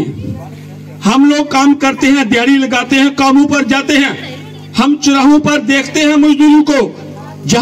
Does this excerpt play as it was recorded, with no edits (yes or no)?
yes